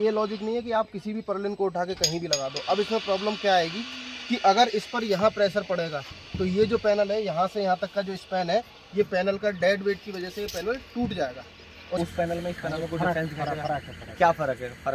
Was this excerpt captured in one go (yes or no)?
no